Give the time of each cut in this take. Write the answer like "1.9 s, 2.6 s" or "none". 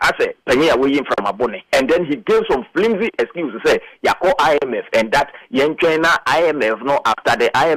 1.6 s